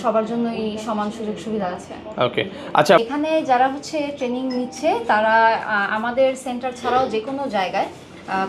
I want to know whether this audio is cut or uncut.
cut